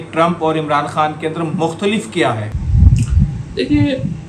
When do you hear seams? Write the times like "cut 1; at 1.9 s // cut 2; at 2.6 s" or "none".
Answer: none